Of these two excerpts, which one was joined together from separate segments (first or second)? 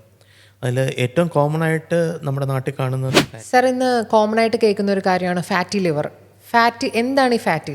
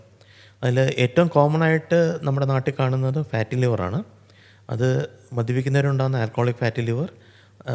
first